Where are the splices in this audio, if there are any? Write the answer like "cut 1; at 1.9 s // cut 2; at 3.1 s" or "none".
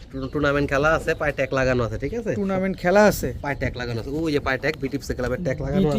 none